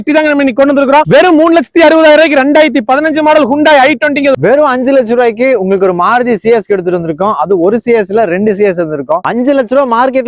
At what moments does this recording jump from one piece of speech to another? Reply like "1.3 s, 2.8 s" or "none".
1.0 s, 4.4 s, 9.2 s